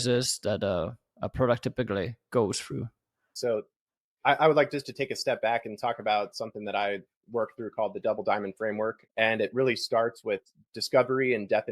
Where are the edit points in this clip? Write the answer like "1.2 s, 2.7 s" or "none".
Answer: 3.3 s, 9.0 s